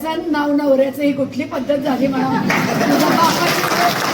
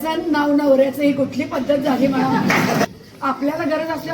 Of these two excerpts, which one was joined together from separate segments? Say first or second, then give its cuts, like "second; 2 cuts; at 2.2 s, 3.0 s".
second; 1 cut; at 2.9 s